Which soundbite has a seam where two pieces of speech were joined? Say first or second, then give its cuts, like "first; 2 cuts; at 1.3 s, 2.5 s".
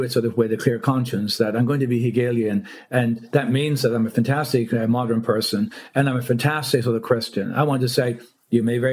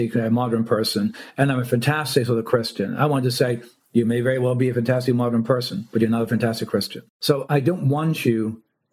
second; 1 cut; at 7.4 s